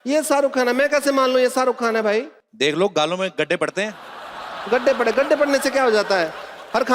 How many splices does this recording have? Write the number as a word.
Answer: one